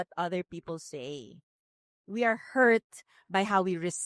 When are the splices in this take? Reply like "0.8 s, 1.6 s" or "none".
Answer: none